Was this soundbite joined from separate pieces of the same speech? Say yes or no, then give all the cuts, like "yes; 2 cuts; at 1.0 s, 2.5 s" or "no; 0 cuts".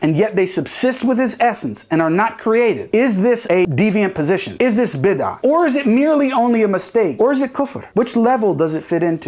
yes; 2 cuts; at 3.7 s, 7.1 s